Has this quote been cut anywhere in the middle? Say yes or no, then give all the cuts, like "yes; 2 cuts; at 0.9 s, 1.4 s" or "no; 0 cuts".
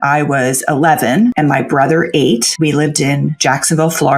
yes; 2 cuts; at 1.3 s, 2.5 s